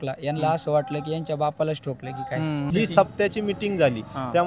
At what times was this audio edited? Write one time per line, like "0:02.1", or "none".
0:02.7

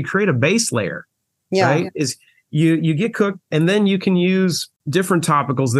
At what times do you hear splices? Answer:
0:04.7

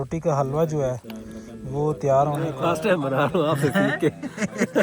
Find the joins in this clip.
0:02.5

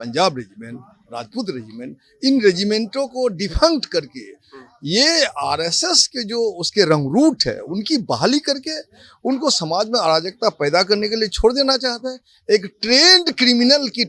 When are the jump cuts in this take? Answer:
none

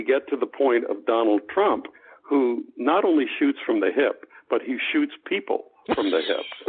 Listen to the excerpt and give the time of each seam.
none

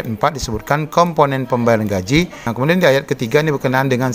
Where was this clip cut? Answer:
0:02.4

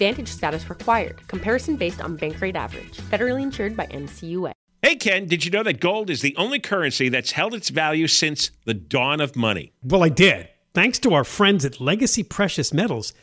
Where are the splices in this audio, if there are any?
0:04.6

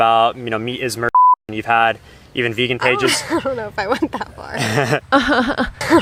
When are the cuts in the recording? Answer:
none

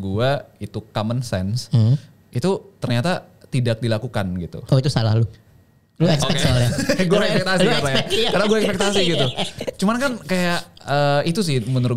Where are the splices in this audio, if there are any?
none

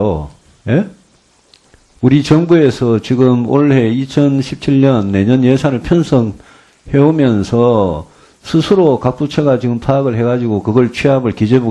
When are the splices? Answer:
none

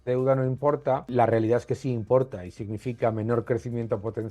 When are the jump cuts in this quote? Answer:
0:01.1

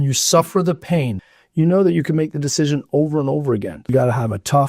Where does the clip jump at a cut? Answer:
0:01.2
0:03.8

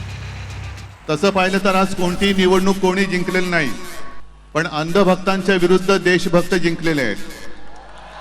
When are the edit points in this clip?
0:00.9

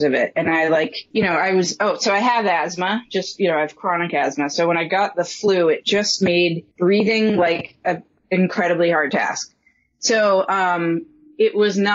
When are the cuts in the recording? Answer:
0:01.0
0:06.7

